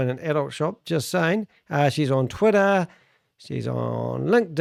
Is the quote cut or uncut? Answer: uncut